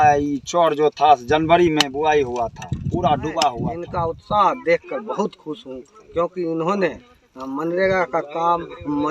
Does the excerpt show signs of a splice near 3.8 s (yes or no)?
yes